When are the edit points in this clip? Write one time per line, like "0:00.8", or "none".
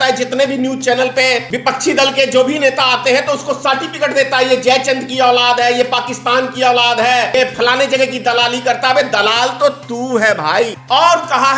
0:01.5
0:07.4
0:10.8